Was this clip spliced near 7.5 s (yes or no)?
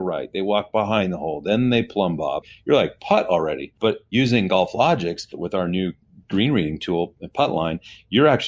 no